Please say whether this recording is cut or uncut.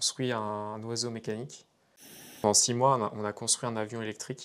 cut